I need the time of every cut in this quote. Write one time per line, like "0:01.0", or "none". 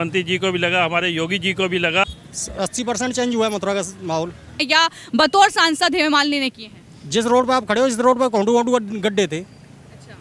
0:02.0
0:04.6